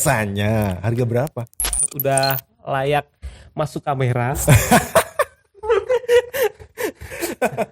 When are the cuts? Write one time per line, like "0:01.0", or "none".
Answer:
0:01.8